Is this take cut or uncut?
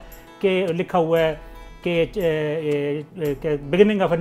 uncut